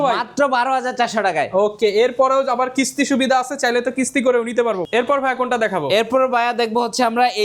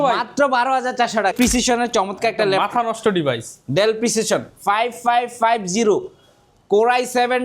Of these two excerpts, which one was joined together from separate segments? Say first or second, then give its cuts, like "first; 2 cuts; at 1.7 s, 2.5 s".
second; 1 cut; at 1.3 s